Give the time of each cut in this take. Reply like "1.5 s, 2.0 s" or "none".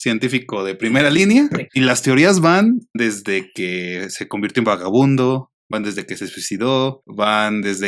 1.6 s, 3.0 s